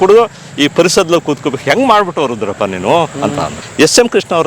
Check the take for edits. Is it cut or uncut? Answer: cut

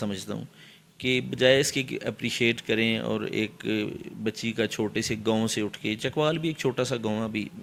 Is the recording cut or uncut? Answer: uncut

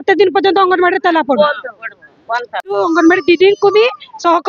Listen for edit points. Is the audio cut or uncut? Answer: cut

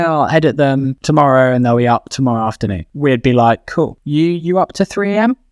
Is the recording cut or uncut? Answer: cut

